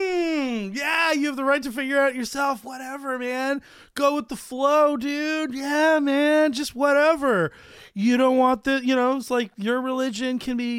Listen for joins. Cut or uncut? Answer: uncut